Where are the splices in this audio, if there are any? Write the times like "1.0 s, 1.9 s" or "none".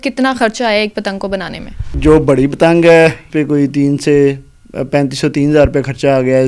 2.0 s, 3.3 s